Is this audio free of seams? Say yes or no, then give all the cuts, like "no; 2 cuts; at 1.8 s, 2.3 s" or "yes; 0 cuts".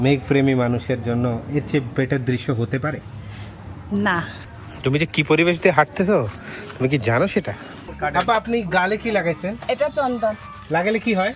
no; 2 cuts; at 4.4 s, 7.8 s